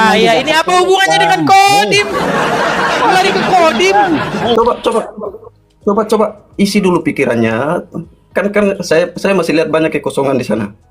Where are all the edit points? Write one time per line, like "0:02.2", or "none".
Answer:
0:04.5

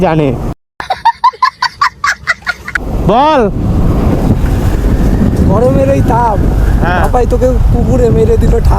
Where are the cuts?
0:02.8

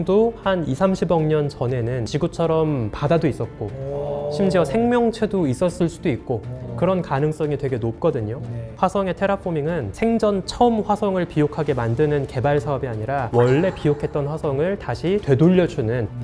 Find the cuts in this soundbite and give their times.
0:08.7

